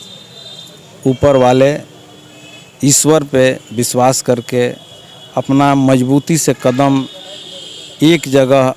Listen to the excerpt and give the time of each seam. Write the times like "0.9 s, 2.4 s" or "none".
none